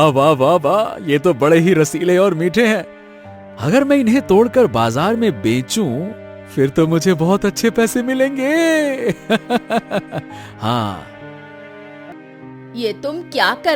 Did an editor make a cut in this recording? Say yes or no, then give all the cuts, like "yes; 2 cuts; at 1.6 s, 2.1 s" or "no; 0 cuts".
yes; 1 cut; at 12.1 s